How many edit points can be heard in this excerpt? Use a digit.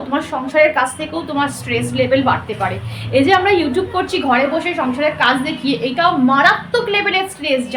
0